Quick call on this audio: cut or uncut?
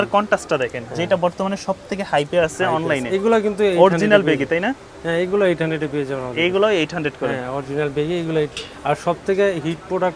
uncut